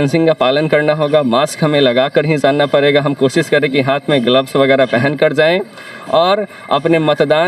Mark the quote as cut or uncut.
uncut